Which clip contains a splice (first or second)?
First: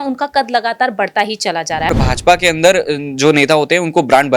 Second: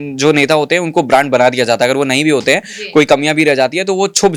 first